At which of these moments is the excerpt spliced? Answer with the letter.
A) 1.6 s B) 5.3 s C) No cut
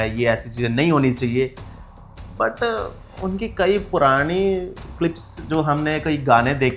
C